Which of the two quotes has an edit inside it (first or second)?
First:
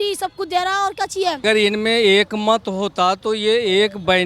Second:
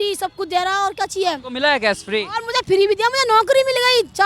first